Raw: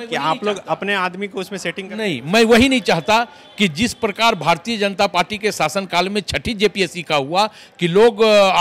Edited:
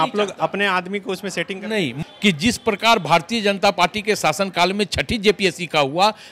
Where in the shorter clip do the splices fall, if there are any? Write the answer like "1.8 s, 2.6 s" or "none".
1.9 s